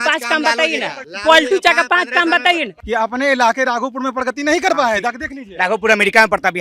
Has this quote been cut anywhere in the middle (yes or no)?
yes